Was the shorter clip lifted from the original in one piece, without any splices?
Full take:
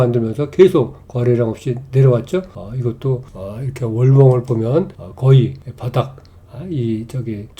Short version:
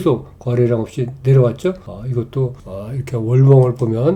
yes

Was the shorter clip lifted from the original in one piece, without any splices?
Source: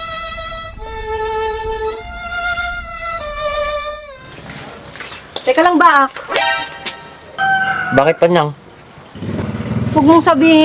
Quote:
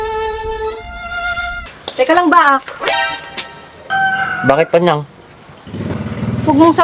no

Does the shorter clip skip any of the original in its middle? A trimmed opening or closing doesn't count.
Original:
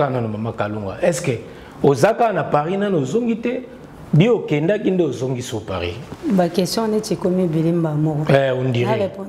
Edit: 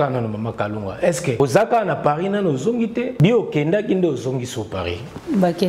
yes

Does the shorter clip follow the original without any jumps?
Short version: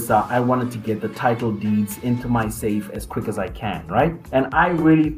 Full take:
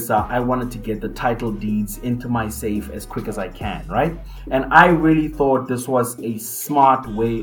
no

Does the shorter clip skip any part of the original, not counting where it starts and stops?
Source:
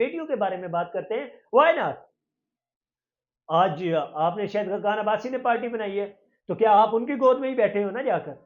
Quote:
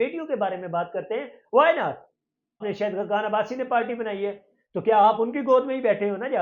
yes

